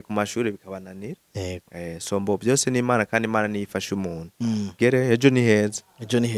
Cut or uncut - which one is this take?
cut